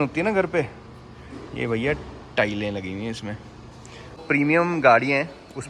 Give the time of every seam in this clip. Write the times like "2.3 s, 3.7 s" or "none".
4.2 s